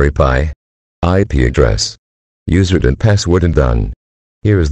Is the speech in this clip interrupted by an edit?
yes; 1 cut; at 3.5 s

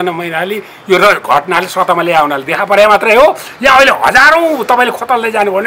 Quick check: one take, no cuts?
yes; 0 cuts

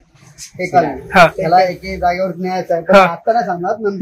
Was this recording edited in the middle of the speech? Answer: no; 0 cuts

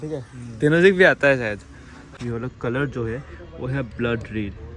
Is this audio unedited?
no; 1 cut; at 1.7 s

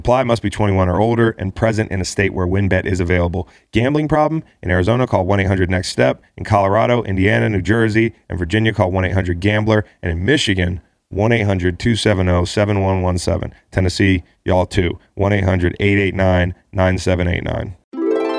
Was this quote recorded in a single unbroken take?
yes; 0 cuts

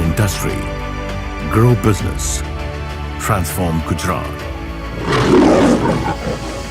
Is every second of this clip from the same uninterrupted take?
yes; 0 cuts

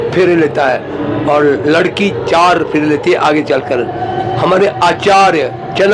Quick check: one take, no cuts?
yes; 0 cuts

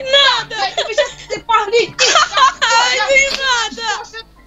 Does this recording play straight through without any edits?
yes; 0 cuts

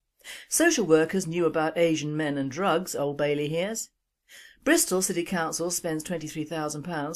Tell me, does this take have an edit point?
no; 0 cuts

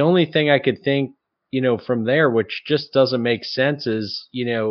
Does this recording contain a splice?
no; 0 cuts

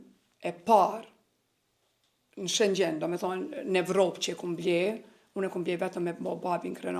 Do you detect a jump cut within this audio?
no; 0 cuts

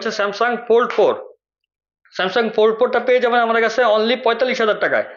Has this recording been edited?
no; 0 cuts

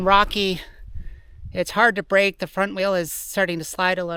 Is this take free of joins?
yes; 0 cuts

